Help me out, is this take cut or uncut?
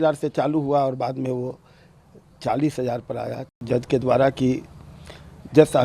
cut